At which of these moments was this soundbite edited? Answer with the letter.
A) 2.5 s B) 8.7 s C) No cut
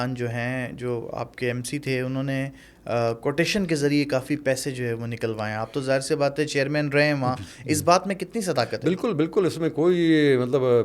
C